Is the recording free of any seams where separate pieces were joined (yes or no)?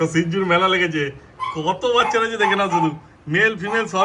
yes